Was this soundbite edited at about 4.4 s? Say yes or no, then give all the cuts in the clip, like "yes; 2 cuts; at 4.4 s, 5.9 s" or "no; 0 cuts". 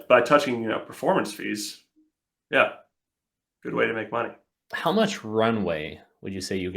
yes; 1 cut; at 4.4 s